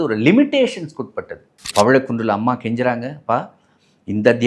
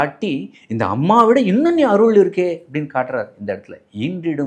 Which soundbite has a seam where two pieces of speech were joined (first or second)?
first